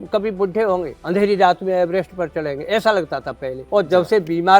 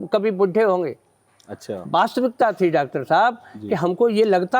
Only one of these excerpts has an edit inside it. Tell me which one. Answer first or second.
first